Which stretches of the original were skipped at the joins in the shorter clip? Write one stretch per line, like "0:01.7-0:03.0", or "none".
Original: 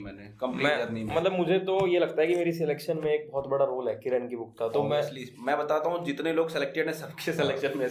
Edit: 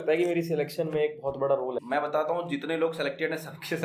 0:03.9-0:05.4